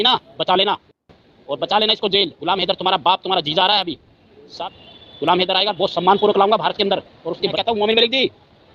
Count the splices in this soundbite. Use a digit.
2